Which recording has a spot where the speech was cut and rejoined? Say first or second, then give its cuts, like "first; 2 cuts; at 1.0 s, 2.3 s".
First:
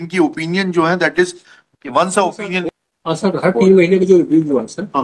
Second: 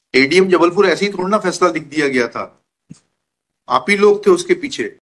first; 1 cut; at 2.6 s